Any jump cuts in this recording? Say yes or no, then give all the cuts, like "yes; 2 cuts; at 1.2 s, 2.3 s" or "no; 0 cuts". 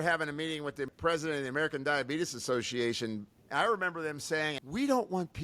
yes; 3 cuts; at 0.9 s, 3.3 s, 4.6 s